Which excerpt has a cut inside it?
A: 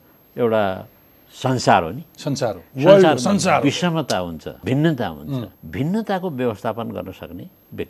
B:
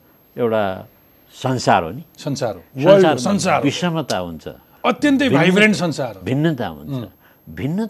A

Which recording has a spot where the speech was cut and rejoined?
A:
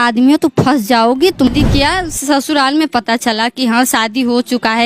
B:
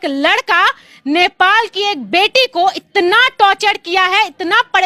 A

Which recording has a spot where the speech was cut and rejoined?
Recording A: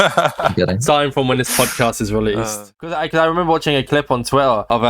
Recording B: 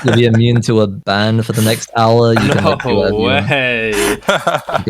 A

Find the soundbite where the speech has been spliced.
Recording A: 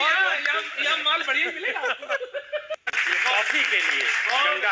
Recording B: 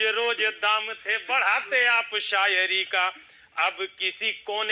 A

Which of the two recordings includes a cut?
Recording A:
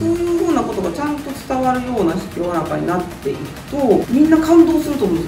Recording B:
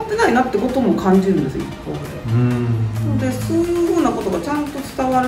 A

